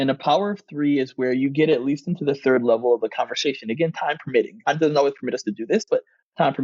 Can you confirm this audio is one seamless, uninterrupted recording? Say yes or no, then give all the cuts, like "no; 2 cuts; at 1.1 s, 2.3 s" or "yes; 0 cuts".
no; 1 cut; at 4.7 s